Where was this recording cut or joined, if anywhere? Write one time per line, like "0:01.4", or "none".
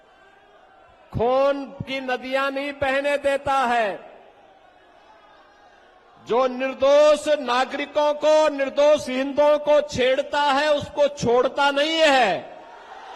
none